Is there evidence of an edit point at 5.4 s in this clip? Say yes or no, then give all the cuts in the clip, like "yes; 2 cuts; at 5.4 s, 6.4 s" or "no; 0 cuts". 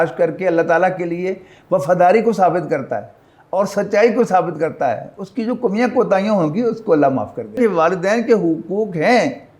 no; 1 cut; at 7.6 s